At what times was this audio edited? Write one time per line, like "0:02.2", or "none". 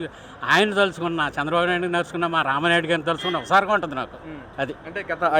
none